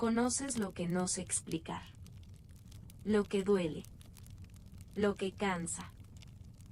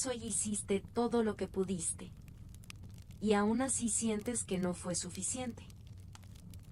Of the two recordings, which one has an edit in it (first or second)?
second